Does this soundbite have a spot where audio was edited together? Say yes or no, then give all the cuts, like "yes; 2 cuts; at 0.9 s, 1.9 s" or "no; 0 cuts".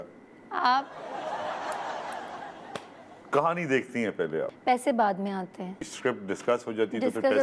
yes; 3 cuts; at 3.1 s, 4.5 s, 5.7 s